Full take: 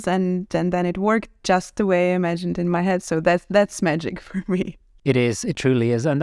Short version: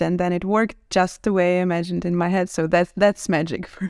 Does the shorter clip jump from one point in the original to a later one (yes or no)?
no